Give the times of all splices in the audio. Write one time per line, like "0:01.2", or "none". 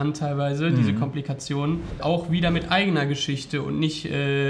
0:02.0